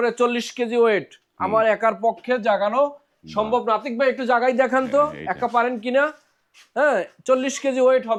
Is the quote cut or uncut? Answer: uncut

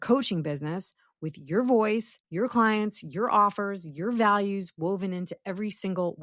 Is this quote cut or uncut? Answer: cut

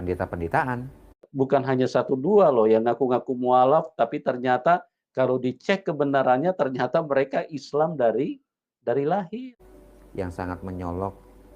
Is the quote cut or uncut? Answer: cut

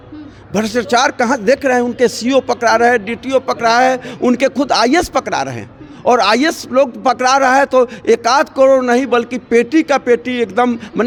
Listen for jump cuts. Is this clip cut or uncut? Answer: uncut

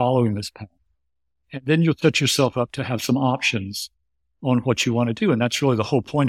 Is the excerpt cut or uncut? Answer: uncut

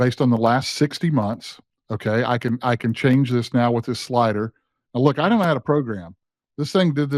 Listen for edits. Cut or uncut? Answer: uncut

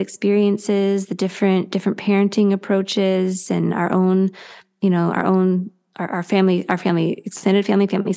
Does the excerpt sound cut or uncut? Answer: uncut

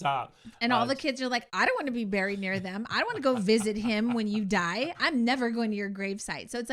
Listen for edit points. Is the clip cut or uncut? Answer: uncut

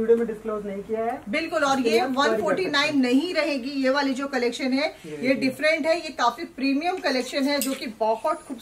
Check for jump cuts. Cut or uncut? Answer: uncut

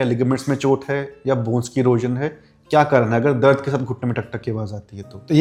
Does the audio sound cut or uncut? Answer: uncut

